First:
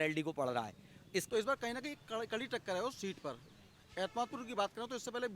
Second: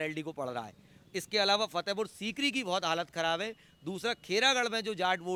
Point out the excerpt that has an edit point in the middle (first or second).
first